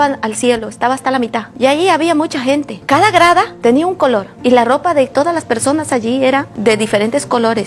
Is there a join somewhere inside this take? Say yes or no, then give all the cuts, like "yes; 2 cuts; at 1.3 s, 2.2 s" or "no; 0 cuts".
no; 0 cuts